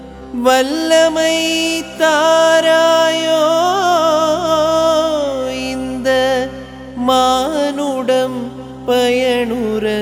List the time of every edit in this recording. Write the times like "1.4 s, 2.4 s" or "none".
none